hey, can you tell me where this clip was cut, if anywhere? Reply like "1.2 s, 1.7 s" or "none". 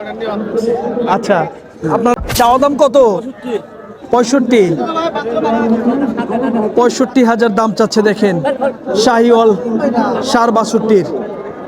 2.1 s